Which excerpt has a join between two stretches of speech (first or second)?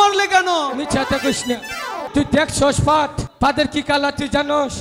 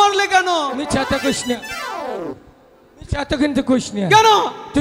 first